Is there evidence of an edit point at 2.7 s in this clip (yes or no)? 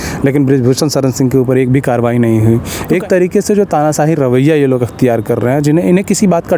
yes